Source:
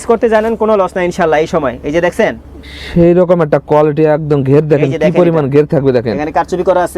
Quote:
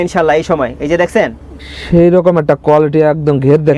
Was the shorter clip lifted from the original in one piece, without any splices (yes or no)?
yes